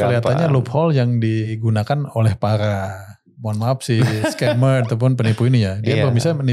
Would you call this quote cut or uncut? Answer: cut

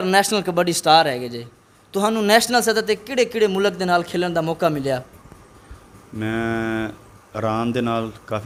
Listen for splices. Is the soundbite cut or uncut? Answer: uncut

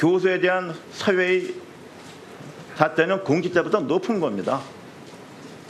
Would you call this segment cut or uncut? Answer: cut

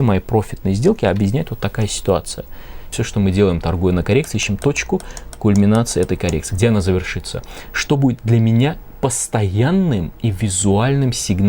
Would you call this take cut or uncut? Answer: cut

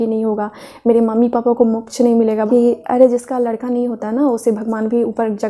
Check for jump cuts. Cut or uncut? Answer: cut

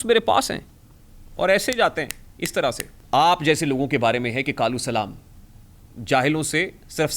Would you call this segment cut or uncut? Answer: cut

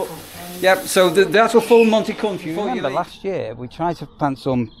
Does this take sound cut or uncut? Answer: cut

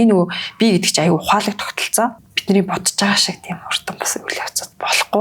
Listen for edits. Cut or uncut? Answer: cut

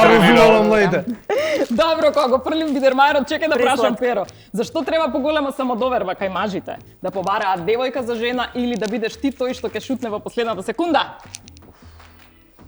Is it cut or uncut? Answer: uncut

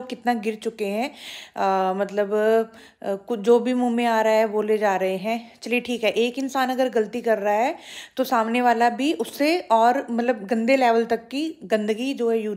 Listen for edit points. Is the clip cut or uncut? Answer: uncut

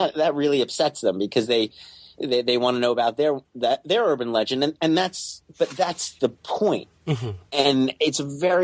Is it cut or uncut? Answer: uncut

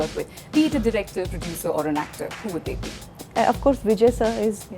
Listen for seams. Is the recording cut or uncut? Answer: cut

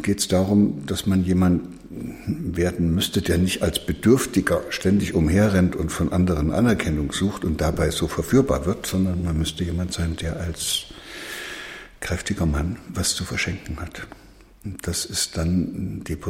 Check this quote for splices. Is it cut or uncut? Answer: uncut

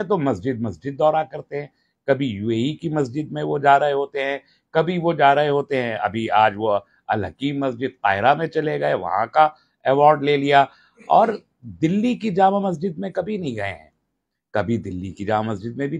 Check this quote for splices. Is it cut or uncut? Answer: uncut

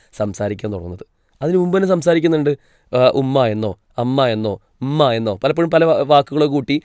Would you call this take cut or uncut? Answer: uncut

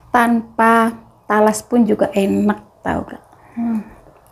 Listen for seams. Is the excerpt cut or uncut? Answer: uncut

